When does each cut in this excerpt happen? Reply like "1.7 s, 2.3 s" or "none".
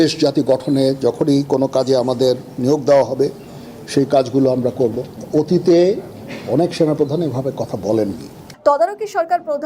8.4 s